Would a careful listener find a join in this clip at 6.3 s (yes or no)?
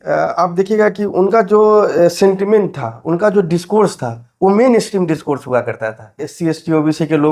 yes